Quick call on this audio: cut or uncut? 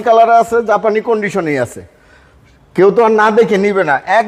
uncut